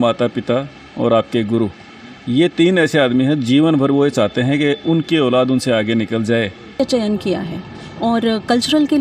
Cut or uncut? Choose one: cut